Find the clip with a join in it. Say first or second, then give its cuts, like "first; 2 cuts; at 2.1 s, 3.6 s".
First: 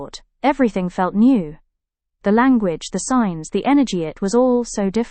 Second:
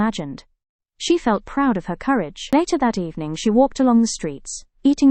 second; 1 cut; at 2.5 s